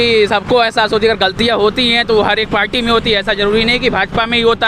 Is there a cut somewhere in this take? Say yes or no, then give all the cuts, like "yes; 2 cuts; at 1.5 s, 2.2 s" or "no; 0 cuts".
no; 0 cuts